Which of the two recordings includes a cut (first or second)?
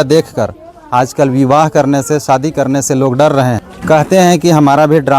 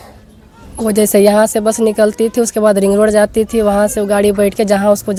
first